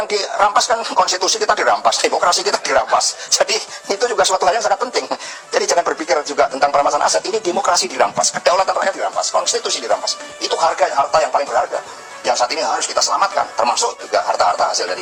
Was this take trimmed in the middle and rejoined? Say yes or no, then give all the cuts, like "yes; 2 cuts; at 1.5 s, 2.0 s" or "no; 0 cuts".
no; 0 cuts